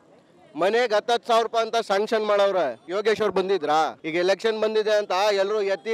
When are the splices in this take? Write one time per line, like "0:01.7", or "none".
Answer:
0:02.8
0:04.0